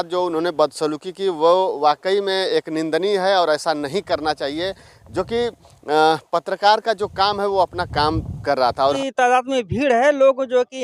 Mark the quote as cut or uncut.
uncut